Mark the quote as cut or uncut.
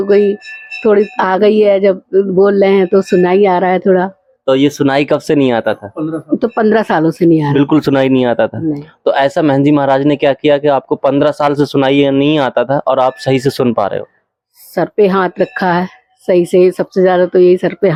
uncut